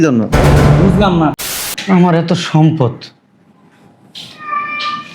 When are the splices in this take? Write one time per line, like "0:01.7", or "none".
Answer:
0:01.5